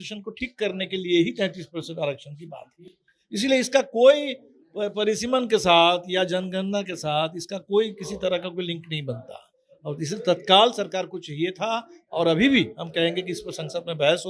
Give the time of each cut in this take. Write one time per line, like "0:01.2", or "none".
none

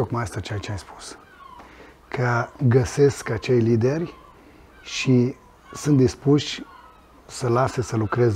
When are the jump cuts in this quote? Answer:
none

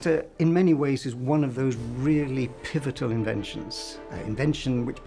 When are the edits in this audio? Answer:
none

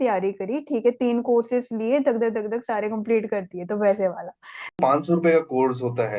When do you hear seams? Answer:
0:04.8

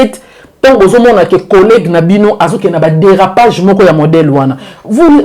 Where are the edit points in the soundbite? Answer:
none

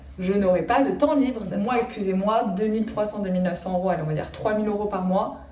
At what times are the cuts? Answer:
0:01.5

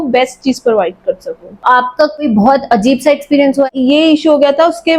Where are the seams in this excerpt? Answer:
0:01.6
0:03.7

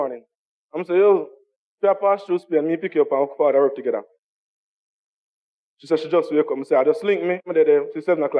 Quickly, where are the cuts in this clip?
0:07.5

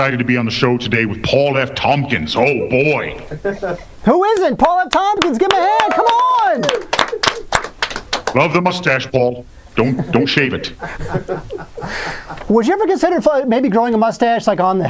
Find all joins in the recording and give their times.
0:08.5

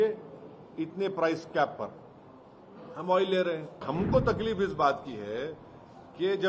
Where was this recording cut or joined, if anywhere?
0:03.8

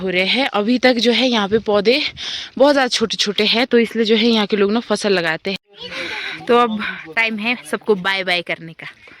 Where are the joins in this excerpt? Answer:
0:05.5

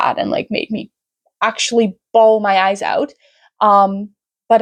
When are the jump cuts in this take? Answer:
none

